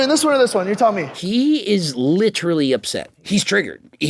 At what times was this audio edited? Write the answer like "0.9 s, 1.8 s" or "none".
1.1 s